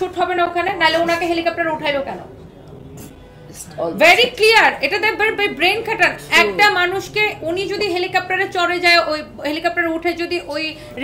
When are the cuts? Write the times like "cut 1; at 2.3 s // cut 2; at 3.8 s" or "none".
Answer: none